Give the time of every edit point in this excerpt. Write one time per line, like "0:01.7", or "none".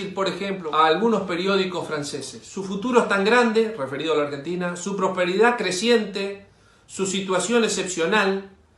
none